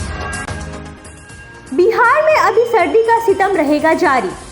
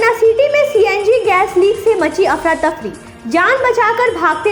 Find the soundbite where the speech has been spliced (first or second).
first